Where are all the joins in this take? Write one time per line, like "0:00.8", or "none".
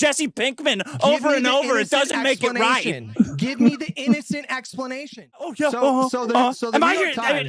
0:05.5